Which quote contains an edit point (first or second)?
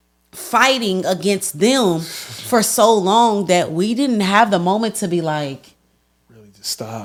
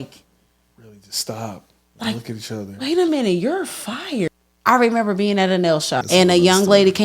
second